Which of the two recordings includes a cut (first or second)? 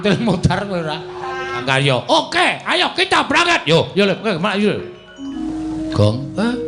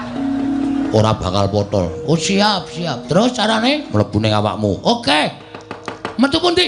first